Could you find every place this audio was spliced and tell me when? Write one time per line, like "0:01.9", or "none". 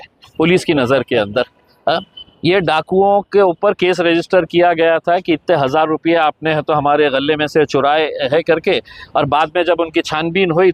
none